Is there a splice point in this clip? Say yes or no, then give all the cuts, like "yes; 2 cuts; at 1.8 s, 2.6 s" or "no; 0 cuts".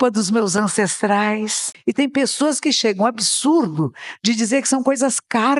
yes; 1 cut; at 1.7 s